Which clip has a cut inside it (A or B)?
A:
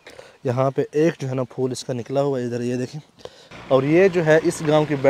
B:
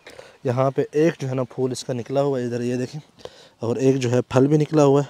A